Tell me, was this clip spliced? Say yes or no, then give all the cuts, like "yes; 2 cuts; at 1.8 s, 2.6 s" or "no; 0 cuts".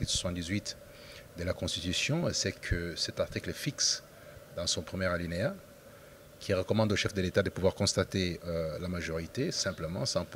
no; 0 cuts